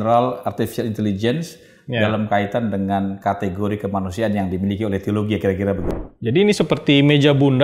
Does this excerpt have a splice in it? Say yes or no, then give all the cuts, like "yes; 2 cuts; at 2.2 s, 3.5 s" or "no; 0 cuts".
yes; 1 cut; at 5.9 s